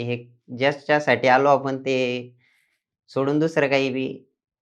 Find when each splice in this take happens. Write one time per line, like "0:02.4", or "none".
none